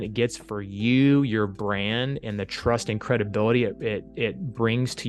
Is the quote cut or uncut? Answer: uncut